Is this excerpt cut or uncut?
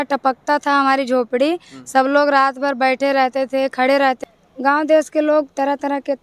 cut